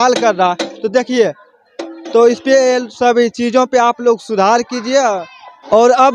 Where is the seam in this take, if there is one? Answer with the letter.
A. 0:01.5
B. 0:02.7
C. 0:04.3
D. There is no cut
D